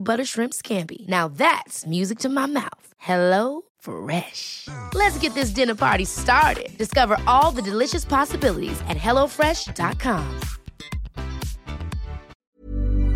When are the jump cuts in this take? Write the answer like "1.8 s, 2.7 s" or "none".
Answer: 12.2 s